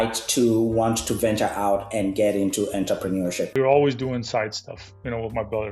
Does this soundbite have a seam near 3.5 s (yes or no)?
yes